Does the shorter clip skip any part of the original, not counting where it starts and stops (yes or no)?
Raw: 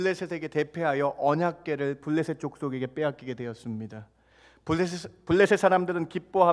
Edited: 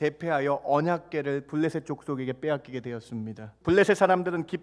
yes